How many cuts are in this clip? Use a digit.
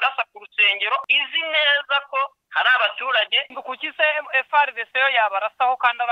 3